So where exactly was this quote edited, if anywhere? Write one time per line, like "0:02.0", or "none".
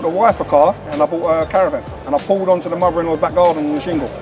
0:00.9
0:01.9